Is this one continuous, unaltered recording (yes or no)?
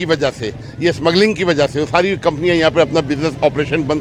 yes